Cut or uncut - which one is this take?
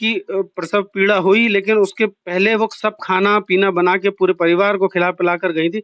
uncut